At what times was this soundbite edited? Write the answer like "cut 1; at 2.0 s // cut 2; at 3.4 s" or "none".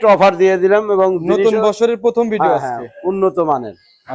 none